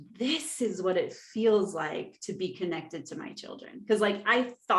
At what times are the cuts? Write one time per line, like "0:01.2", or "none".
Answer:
none